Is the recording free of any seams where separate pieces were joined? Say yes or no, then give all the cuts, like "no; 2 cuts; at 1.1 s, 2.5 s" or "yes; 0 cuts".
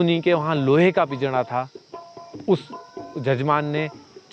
yes; 0 cuts